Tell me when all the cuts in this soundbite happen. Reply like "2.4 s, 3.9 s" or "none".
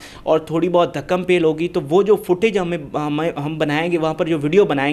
none

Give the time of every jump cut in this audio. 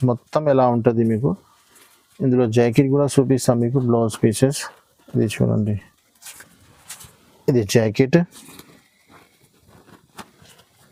none

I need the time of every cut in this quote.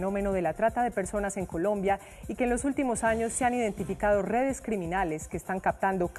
4.8 s

